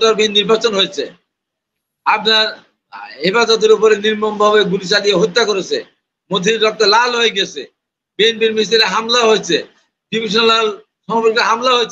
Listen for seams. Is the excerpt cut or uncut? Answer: uncut